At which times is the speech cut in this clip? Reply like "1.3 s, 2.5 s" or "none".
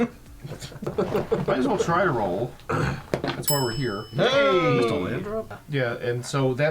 0.9 s, 5.6 s